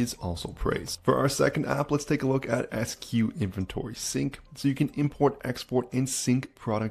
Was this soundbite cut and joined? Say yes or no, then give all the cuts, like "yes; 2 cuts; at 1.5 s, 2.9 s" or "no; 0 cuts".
no; 0 cuts